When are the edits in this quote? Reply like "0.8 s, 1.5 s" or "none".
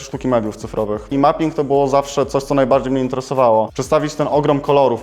1.1 s, 3.7 s